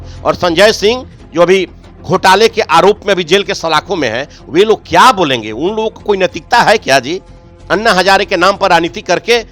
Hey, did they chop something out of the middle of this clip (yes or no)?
no